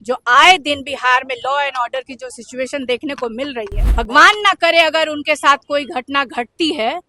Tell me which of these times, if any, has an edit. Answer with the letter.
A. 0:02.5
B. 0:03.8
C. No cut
B